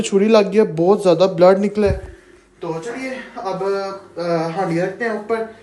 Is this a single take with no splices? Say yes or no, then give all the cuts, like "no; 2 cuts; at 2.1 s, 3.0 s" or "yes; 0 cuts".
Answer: yes; 0 cuts